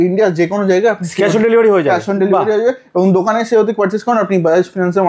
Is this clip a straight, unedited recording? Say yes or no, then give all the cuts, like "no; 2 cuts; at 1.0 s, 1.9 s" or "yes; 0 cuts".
yes; 0 cuts